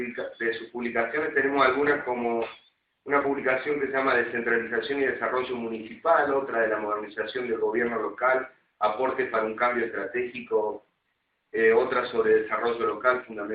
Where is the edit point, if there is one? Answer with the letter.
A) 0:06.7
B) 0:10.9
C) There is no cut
C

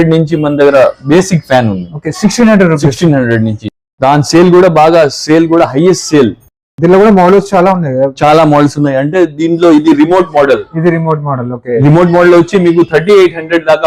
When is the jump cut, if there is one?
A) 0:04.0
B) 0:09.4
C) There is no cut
C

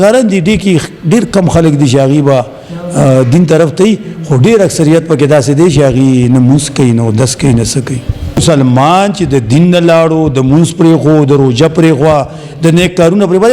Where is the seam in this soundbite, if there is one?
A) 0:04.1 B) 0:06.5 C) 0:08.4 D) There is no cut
C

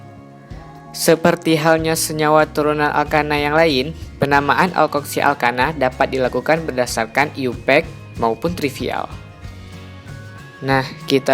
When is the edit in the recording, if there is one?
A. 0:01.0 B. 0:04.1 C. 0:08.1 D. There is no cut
A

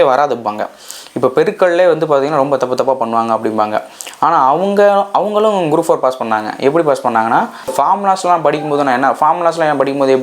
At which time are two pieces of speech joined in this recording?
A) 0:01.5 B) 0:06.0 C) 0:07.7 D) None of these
C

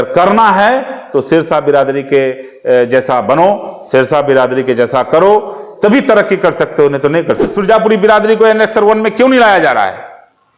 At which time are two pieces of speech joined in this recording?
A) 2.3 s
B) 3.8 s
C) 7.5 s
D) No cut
C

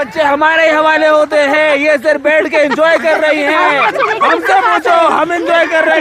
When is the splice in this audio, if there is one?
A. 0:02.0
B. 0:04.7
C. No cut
C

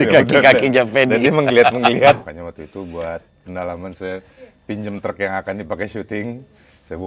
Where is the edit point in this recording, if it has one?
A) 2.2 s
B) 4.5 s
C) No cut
A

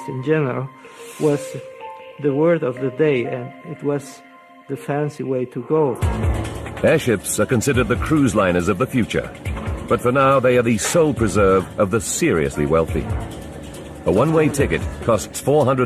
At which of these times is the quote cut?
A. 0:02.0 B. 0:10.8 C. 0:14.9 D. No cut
D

